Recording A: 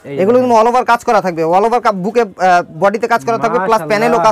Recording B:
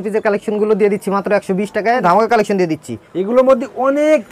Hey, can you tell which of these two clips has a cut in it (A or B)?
B